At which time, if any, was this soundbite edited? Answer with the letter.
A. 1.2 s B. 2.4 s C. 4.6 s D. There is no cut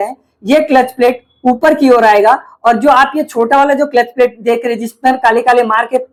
D